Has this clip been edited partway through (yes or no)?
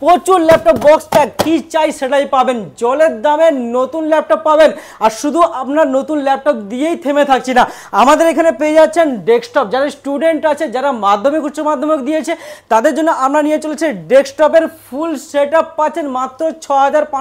no